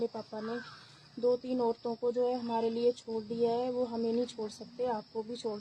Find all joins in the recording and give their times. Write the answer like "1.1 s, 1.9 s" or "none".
none